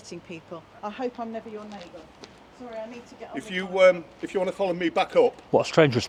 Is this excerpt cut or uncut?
uncut